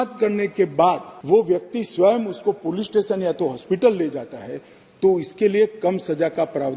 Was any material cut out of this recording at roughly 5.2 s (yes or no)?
no